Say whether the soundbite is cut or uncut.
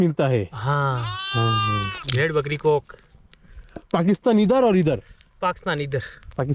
uncut